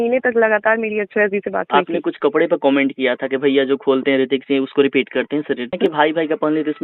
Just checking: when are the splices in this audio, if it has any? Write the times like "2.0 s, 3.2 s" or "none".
1.7 s, 5.7 s